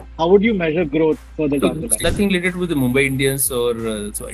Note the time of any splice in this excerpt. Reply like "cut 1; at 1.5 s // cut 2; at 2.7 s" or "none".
cut 1; at 1.3 s